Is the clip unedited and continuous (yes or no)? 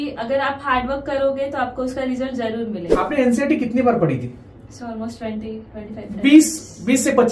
no